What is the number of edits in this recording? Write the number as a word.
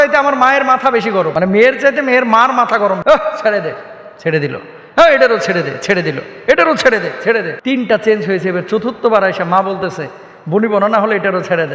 three